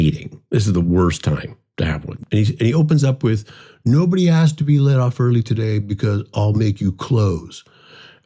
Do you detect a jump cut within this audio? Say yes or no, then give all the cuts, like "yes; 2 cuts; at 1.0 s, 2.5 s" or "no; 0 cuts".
yes; 1 cut; at 2.1 s